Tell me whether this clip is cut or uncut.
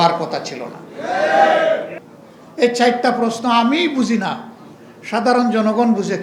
cut